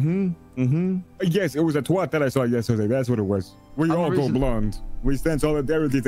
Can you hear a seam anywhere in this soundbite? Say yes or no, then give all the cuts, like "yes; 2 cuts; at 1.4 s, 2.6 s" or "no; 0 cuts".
yes; 2 cuts; at 1.1 s, 3.6 s